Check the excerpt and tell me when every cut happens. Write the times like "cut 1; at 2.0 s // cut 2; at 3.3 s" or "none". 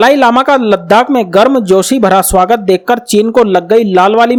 none